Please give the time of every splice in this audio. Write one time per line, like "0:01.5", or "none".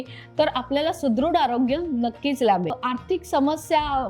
0:02.8